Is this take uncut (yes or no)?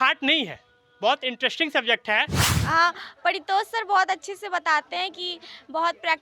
no